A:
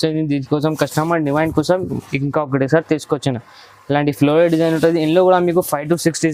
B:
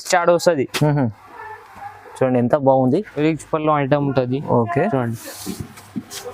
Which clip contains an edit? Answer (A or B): B